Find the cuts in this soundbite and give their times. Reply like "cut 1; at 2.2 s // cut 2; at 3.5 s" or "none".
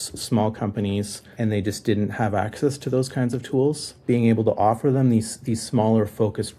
cut 1; at 1.3 s // cut 2; at 3.9 s